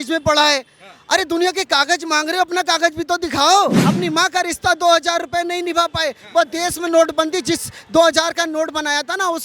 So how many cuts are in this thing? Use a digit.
1